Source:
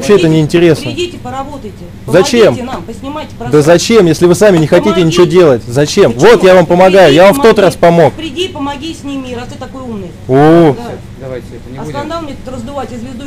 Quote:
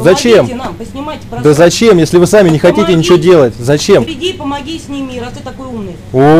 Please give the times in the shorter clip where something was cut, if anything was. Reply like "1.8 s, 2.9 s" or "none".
4.1 s